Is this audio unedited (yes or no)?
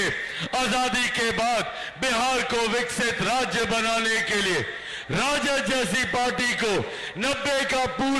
yes